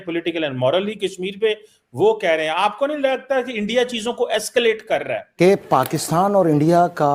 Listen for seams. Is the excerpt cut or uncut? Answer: cut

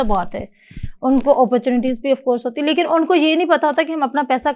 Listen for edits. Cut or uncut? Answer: uncut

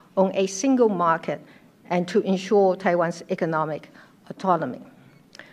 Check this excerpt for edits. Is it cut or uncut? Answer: uncut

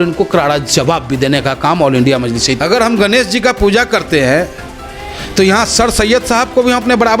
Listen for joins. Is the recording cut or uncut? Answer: cut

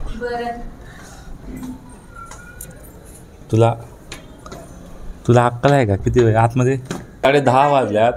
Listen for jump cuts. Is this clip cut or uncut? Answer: cut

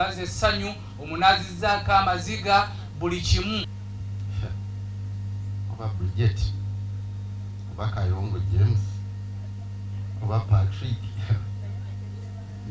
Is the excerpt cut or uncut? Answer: cut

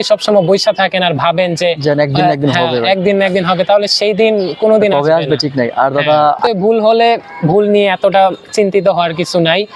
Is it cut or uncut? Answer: cut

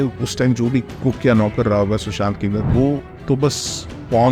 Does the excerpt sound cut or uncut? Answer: cut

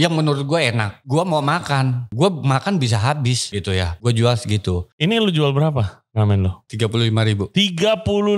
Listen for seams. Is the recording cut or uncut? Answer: cut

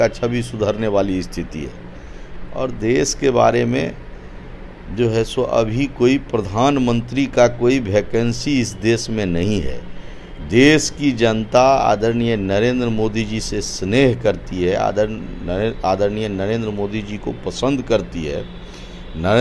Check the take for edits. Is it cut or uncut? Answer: uncut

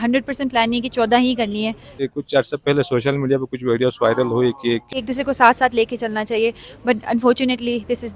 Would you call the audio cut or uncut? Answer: cut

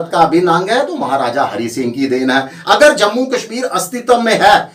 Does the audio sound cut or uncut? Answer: uncut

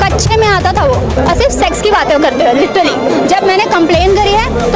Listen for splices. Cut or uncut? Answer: cut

